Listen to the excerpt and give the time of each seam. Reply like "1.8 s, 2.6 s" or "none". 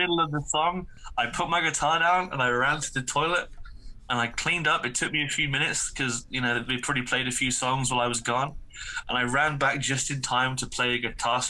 none